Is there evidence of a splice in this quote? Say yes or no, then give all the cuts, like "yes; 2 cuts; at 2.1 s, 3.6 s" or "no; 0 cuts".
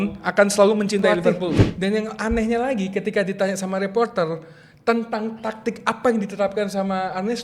yes; 1 cut; at 1.5 s